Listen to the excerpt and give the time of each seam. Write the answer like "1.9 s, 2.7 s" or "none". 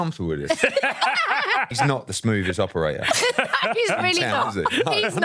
1.9 s